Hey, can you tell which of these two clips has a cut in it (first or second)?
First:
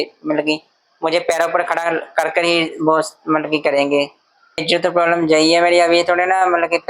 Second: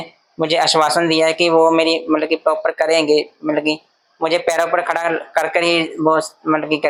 first